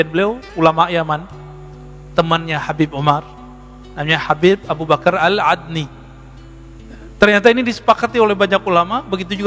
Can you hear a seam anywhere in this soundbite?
no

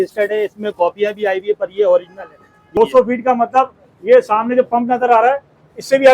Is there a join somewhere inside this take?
yes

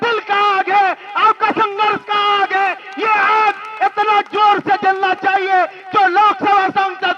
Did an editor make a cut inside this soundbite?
no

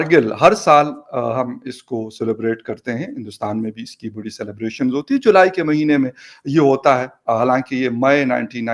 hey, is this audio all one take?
yes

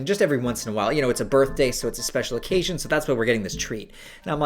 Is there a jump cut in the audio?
no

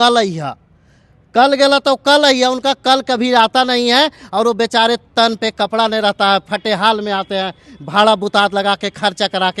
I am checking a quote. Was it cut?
no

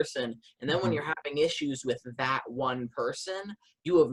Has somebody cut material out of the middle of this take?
no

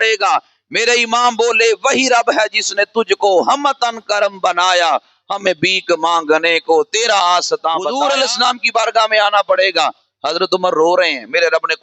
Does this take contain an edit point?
yes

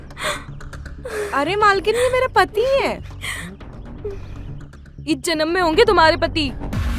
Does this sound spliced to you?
no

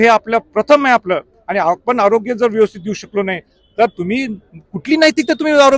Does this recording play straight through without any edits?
yes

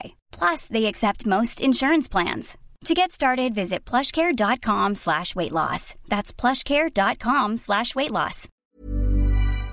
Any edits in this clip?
yes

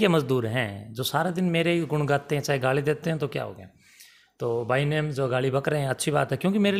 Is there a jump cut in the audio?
no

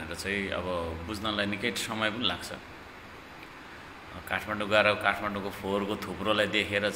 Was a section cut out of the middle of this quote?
no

